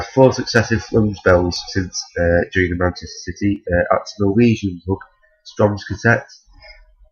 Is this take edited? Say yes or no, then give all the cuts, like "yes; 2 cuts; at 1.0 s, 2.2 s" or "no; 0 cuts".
no; 0 cuts